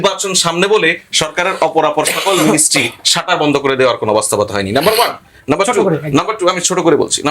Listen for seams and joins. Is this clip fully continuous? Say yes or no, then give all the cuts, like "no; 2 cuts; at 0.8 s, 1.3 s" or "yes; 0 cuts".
yes; 0 cuts